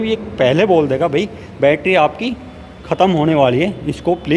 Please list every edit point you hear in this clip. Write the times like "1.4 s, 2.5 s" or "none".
none